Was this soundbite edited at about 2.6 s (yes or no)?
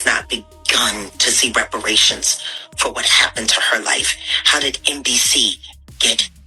no